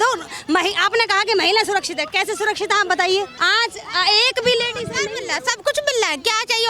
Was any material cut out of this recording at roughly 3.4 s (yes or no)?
yes